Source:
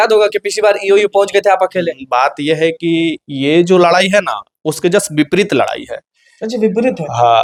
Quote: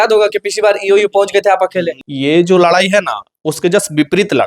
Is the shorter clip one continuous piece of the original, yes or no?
no